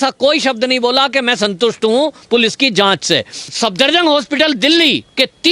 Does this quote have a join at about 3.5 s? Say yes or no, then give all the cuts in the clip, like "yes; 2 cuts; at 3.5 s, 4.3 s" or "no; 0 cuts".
yes; 1 cut; at 3.5 s